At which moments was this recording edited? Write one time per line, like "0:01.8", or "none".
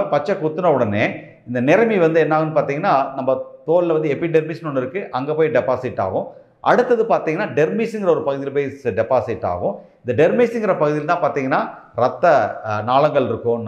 none